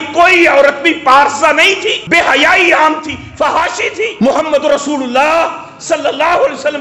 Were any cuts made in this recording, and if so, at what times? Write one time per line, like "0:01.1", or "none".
0:02.0
0:04.1